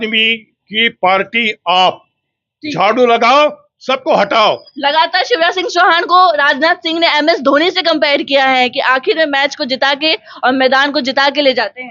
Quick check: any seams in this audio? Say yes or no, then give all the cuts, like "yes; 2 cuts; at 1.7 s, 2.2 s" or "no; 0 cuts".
yes; 1 cut; at 4.7 s